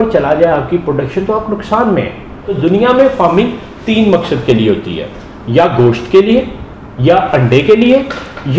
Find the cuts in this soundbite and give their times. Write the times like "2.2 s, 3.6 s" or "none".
2.5 s